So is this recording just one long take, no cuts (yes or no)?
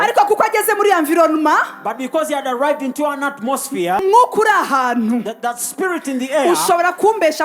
no